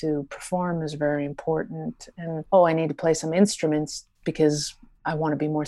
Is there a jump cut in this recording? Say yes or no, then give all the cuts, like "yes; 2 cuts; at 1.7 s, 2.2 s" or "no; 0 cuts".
yes; 1 cut; at 2.4 s